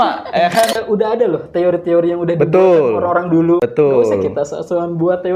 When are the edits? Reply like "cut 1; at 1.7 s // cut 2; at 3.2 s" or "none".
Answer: cut 1; at 0.8 s // cut 2; at 3.6 s